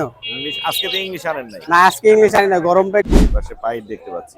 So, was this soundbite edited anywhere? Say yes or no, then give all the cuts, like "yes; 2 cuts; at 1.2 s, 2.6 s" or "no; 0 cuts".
yes; 1 cut; at 3.1 s